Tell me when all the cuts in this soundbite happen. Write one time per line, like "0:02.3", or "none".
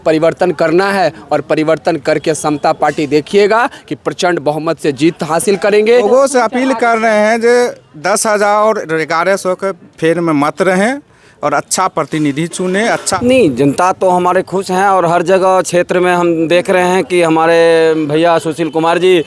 0:06.0
0:13.2